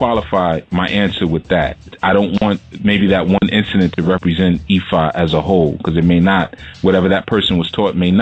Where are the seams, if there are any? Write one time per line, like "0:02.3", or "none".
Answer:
0:06.5